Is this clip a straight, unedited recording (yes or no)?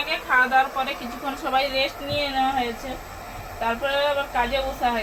yes